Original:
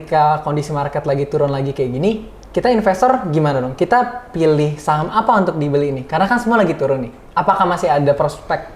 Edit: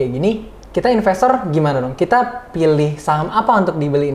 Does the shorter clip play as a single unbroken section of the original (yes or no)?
yes